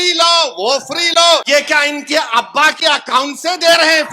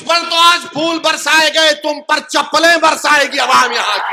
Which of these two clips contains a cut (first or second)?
first